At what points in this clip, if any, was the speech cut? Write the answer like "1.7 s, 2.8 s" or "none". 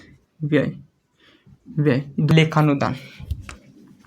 2.3 s